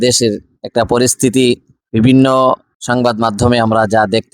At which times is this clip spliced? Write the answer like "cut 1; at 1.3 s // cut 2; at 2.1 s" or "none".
cut 1; at 1.7 s // cut 2; at 2.7 s